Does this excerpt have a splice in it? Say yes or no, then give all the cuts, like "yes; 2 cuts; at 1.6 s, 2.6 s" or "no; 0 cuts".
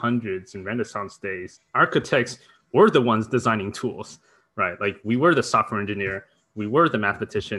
yes; 1 cut; at 1.6 s